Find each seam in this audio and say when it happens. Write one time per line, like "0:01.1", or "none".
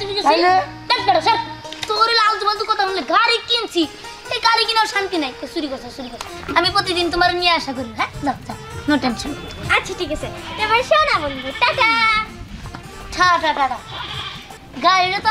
0:06.2